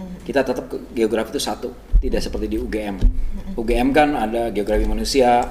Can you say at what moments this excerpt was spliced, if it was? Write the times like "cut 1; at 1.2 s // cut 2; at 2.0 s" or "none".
none

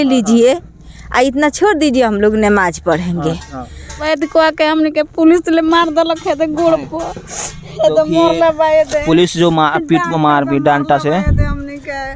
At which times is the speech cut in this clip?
cut 1; at 4.0 s

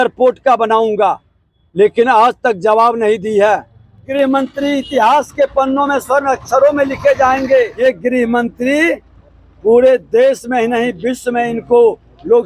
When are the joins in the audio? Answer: cut 1; at 4.1 s // cut 2; at 7.8 s

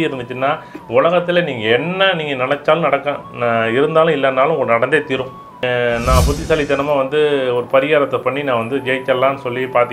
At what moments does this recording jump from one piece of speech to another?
cut 1; at 5.6 s

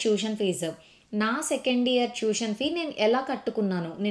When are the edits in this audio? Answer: none

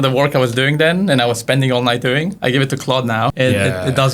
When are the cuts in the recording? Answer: cut 1; at 2.4 s // cut 2; at 3.3 s

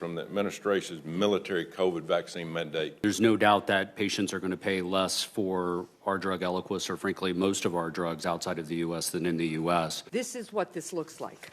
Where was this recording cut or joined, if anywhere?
cut 1; at 3.0 s // cut 2; at 10.0 s

